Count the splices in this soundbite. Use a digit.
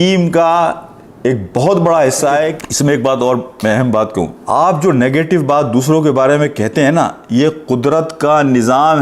2